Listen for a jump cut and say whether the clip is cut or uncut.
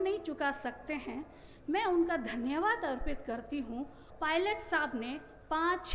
cut